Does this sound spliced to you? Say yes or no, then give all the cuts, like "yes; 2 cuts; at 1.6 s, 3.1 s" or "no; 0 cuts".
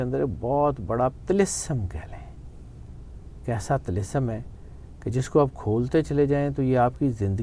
no; 0 cuts